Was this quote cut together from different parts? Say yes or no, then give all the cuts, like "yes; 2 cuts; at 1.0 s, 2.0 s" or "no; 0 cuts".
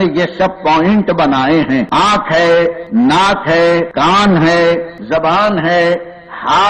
yes; 4 cuts; at 1.9 s, 2.8 s, 3.9 s, 4.9 s